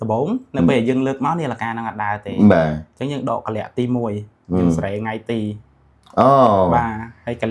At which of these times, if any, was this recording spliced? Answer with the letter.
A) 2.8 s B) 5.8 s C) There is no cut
C